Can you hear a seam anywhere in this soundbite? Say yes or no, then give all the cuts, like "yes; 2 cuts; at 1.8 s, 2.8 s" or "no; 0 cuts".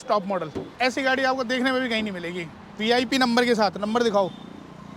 no; 0 cuts